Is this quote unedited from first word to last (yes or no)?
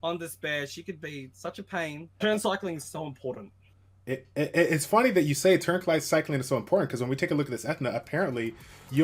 no